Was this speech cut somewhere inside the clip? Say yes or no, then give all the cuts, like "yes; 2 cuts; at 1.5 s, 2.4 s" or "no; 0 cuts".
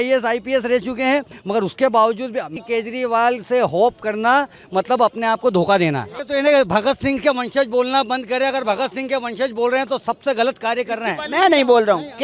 no; 0 cuts